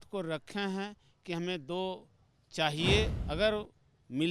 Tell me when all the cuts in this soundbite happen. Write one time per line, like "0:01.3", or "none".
0:03.2